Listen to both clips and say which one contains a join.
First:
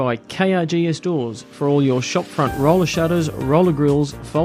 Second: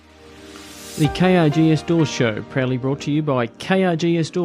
second; 1 cut; at 0.9 s

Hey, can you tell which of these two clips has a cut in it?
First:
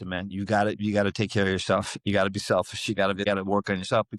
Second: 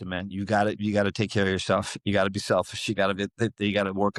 first; 1 cut; at 3.2 s

